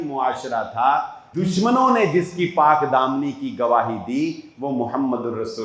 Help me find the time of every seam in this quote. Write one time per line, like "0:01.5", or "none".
0:01.2